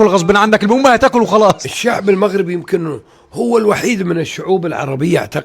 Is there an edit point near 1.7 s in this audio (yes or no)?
yes